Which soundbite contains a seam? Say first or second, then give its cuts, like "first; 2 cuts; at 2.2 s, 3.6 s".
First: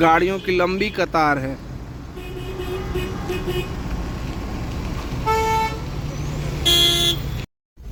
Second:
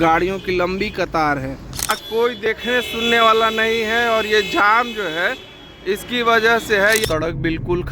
second; 2 cuts; at 2.0 s, 7.0 s